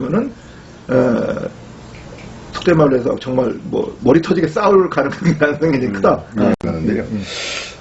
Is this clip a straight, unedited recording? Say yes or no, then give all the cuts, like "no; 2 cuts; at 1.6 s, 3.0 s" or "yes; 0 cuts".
no; 1 cut; at 6.6 s